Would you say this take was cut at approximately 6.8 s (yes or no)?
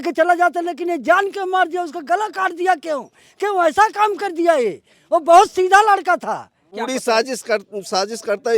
yes